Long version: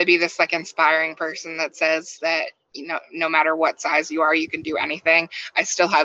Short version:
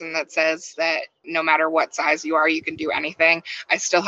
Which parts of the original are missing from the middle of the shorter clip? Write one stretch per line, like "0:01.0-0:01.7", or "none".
0:02.6-0:03.0